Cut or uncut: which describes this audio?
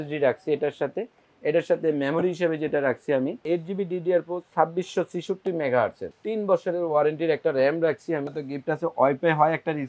cut